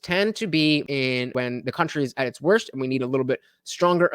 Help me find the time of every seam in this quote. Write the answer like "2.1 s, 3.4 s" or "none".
0.9 s